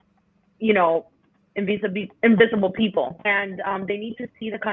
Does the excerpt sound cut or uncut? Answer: cut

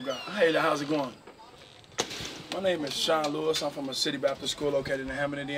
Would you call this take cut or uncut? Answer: uncut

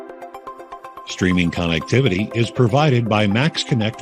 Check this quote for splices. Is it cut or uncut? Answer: cut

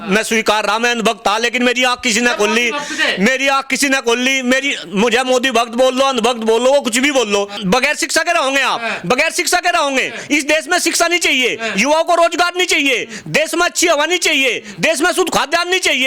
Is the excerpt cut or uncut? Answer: cut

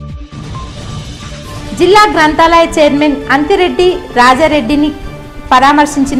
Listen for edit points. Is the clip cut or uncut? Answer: uncut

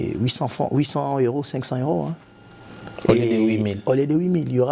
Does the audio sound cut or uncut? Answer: uncut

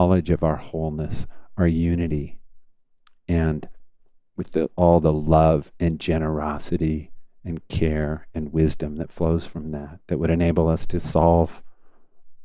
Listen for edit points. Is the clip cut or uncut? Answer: uncut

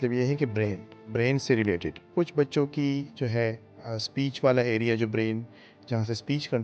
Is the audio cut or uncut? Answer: cut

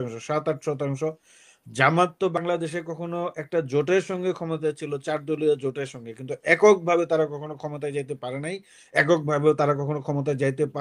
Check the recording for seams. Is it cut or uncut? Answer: uncut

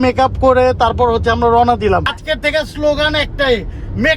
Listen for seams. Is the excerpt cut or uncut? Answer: cut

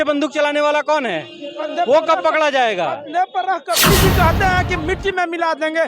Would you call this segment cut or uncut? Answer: cut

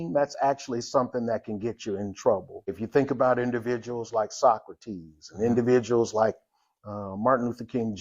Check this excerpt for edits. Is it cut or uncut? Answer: cut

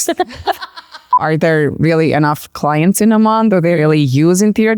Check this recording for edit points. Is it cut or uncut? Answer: cut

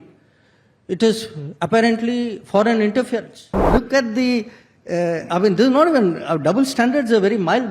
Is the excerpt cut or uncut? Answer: cut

